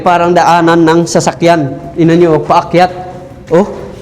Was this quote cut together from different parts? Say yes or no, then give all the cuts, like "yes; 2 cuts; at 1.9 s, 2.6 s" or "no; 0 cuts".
no; 0 cuts